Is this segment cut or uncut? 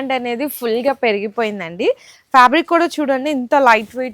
cut